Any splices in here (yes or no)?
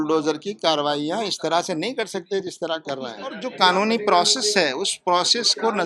yes